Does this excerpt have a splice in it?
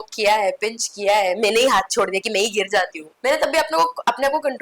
yes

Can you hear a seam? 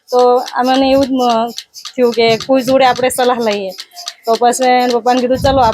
no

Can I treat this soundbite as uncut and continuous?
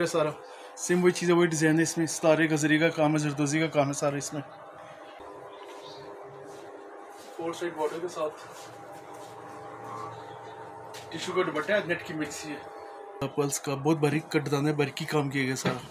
no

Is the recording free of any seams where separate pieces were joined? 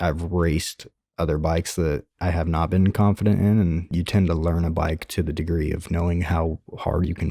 no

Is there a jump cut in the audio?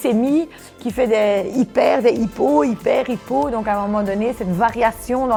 no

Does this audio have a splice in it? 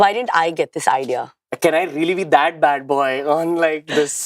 yes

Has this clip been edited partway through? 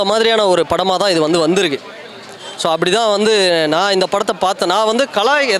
no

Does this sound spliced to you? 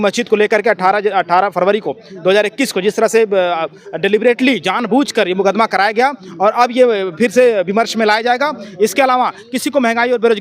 no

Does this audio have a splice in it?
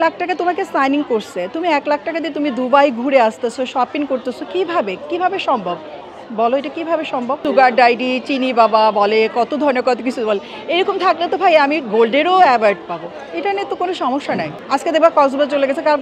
no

